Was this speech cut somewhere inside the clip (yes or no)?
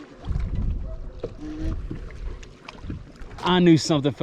yes